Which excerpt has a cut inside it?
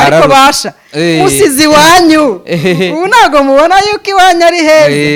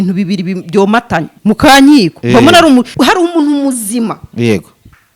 second; 2 cuts; at 1.3 s, 2.9 s

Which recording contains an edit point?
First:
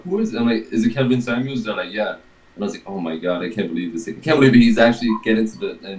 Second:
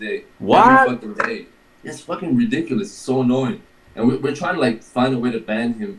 second; 1 cut; at 4.2 s

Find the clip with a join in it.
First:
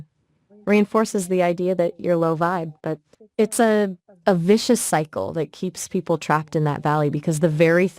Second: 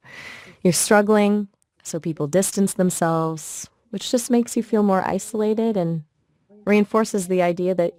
first; 2 cuts; at 3.1 s, 4.1 s

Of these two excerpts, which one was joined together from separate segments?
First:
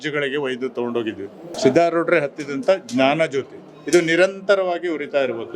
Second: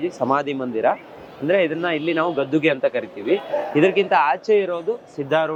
first; 1 cut; at 1.5 s

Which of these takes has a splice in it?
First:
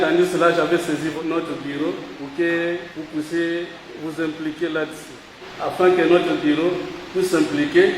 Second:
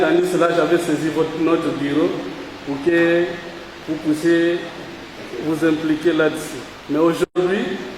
first; 6 cuts; at 1.1 s, 2.1 s, 3.0 s, 3.8 s, 5.4 s, 7.0 s

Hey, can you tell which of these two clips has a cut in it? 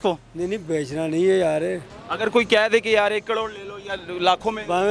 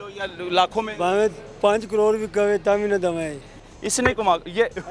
second; 1 cut; at 3.5 s

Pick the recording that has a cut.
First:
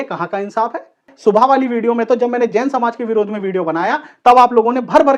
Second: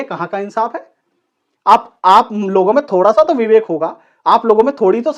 first; 1 cut; at 1.1 s

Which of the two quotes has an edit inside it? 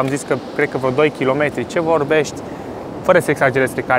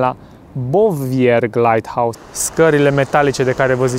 second; 1 cut; at 2.2 s

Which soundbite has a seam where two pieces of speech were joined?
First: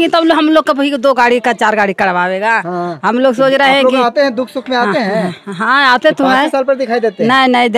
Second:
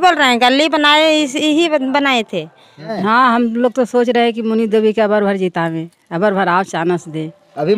second; 1 cut; at 2.9 s

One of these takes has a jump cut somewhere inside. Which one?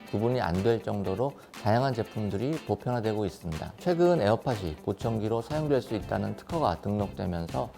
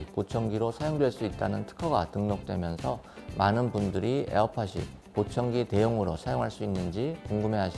first; 1 cut; at 3.7 s

